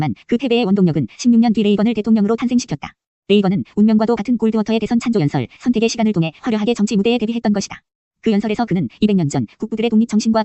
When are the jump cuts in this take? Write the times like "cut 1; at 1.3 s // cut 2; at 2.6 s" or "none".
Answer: none